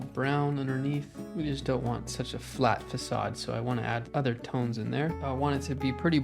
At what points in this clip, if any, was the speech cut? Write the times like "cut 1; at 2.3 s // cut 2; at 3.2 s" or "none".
cut 1; at 1.2 s // cut 2; at 4.1 s // cut 3; at 5.2 s

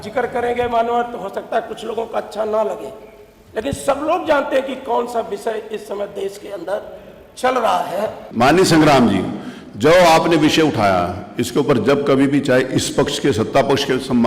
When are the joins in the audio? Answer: cut 1; at 8.2 s

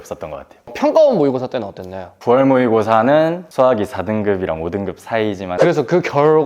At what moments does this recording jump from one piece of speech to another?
cut 1; at 2.2 s // cut 2; at 3.4 s // cut 3; at 5.5 s

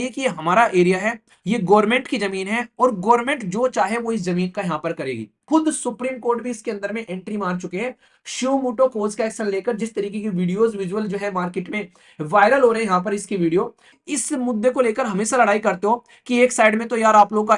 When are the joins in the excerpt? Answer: cut 1; at 5.4 s // cut 2; at 13.9 s

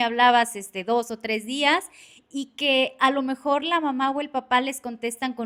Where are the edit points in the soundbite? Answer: none

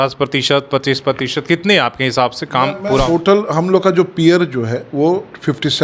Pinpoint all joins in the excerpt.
cut 1; at 3.1 s

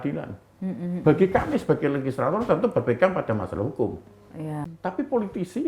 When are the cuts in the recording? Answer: cut 1; at 4.7 s

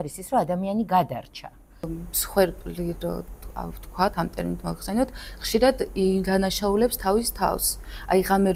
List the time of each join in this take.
cut 1; at 1.8 s

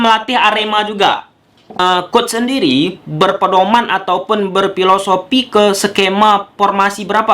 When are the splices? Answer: cut 1; at 1.8 s

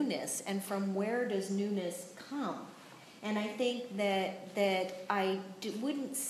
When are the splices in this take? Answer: none

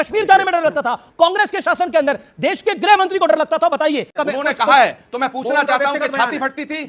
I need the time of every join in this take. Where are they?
cut 1; at 4.1 s

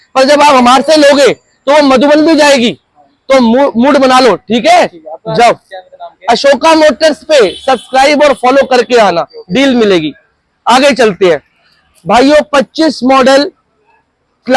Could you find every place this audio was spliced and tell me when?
none

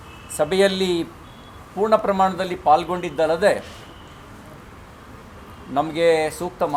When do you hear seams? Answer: none

